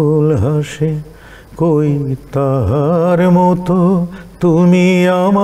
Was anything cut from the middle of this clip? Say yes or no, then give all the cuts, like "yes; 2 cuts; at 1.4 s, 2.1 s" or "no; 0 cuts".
no; 0 cuts